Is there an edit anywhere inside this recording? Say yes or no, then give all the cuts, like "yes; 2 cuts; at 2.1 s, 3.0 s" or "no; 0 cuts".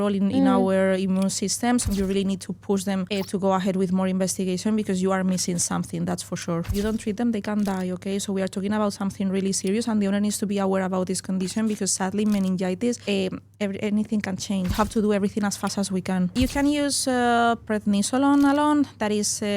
yes; 6 cuts; at 1.9 s, 3.1 s, 6.7 s, 13.0 s, 14.7 s, 16.3 s